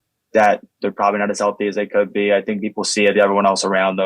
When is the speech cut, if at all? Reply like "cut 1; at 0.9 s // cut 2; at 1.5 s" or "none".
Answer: none